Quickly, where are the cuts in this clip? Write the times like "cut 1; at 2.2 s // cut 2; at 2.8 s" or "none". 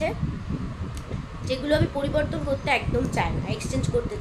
none

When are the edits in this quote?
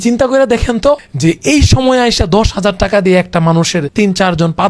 cut 1; at 1.1 s // cut 2; at 3.9 s

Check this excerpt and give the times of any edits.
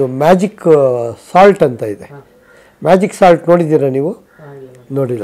none

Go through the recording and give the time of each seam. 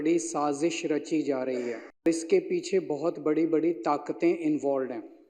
cut 1; at 2.0 s

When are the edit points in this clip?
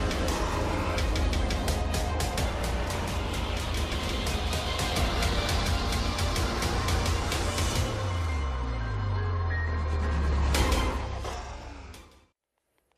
none

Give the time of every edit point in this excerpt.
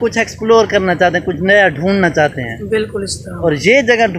cut 1; at 2.6 s

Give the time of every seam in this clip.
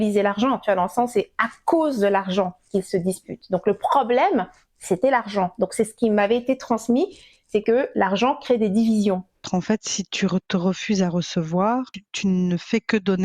cut 1; at 9.4 s // cut 2; at 12.0 s

